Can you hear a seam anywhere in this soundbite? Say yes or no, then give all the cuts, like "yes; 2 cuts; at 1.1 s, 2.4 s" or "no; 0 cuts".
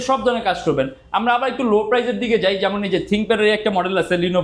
no; 0 cuts